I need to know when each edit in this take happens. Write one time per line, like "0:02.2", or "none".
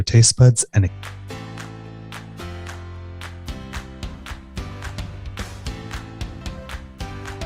0:01.0
0:06.4